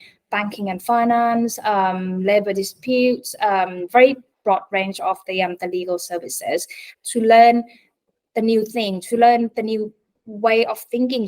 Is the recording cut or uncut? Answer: cut